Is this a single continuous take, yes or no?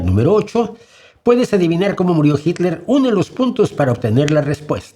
yes